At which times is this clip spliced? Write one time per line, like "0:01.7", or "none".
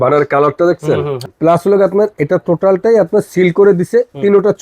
0:01.2